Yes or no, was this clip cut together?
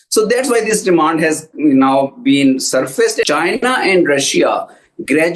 yes